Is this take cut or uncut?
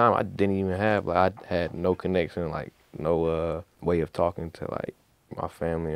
cut